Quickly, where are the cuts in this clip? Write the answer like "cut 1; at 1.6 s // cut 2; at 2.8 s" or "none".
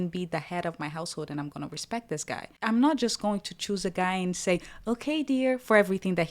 cut 1; at 2.4 s